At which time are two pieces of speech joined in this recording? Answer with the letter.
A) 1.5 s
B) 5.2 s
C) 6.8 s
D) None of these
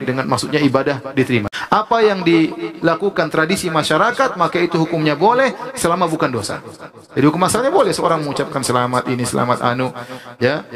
A